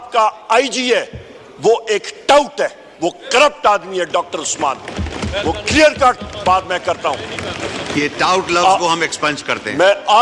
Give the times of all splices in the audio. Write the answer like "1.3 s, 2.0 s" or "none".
none